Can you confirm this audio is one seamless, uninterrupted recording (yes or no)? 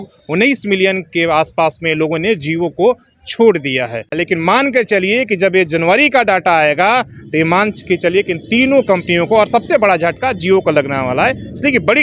no